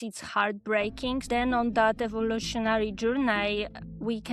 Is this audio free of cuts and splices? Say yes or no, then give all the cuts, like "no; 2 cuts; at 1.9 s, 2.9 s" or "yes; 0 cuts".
no; 1 cut; at 1.2 s